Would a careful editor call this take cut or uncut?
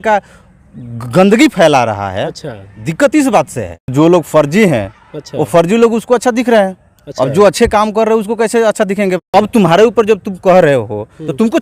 cut